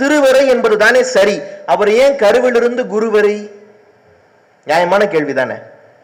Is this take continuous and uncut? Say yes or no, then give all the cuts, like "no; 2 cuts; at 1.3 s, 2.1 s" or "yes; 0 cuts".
yes; 0 cuts